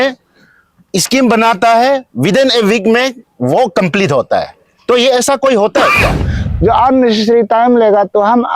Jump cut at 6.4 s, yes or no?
yes